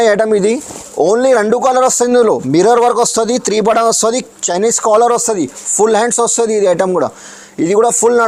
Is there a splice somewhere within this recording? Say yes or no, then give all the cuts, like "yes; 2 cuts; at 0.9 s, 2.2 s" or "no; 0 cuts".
no; 0 cuts